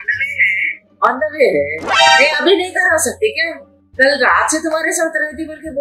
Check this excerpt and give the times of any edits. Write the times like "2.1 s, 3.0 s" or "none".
1.8 s